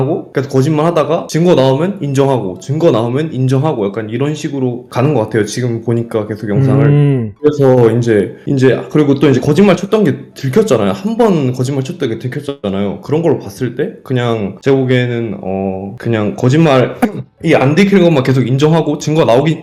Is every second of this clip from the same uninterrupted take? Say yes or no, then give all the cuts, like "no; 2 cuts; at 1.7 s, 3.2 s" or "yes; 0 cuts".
yes; 0 cuts